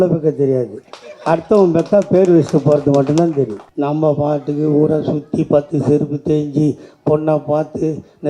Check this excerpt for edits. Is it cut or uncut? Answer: cut